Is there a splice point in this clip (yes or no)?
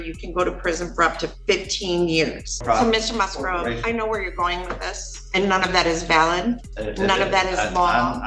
yes